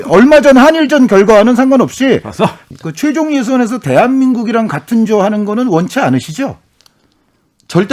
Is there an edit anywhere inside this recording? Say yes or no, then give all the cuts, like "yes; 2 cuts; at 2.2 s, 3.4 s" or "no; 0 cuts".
yes; 1 cut; at 2.6 s